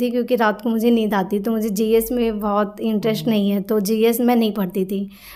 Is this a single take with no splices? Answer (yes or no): yes